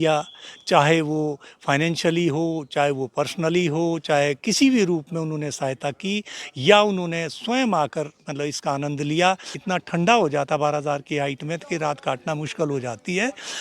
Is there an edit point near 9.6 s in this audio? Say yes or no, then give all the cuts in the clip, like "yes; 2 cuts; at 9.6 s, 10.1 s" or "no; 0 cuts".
yes; 1 cut; at 9.6 s